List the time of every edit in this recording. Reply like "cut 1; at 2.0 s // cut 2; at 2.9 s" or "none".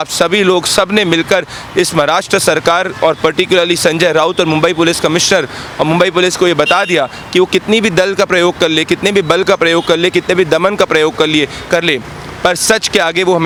none